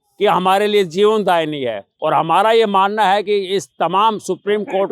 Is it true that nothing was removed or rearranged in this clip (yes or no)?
no